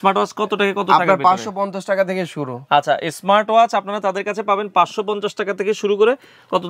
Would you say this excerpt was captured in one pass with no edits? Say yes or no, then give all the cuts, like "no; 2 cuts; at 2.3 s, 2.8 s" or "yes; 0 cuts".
yes; 0 cuts